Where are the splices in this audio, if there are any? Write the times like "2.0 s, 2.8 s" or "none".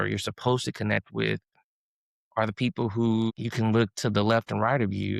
3.4 s